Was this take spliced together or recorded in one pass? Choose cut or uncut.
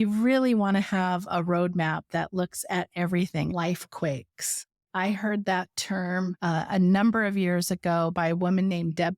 cut